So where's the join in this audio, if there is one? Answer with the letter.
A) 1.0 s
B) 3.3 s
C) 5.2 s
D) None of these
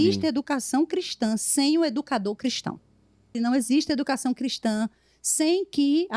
B